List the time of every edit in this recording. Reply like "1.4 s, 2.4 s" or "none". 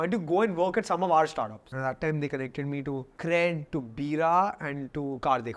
1.6 s, 3.1 s